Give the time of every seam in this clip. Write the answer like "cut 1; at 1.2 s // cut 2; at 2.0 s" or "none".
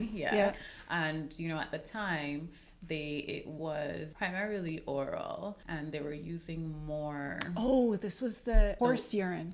cut 1; at 4.1 s // cut 2; at 5.6 s // cut 3; at 8.8 s